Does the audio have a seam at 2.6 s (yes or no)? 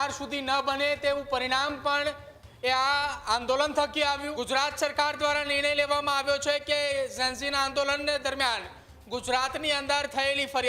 no